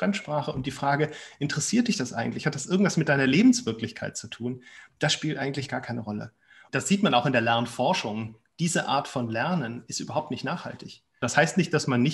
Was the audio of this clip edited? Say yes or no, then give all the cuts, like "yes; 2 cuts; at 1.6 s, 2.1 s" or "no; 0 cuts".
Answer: yes; 2 cuts; at 6.6 s, 11.2 s